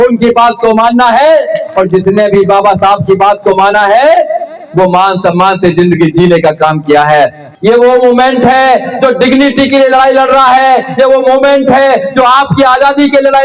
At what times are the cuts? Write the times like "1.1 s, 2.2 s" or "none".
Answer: 7.5 s